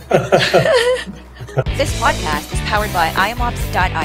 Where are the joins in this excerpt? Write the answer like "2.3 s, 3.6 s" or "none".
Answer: 1.7 s